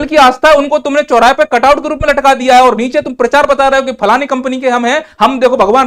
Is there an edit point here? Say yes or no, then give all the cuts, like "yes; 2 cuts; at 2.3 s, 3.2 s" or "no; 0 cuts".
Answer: no; 0 cuts